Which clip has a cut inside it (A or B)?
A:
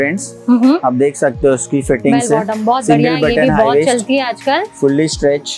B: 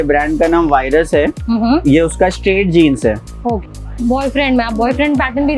B